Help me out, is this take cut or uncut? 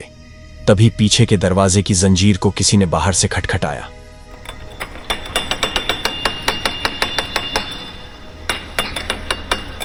uncut